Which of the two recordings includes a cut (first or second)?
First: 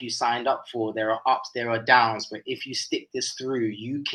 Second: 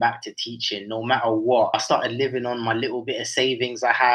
second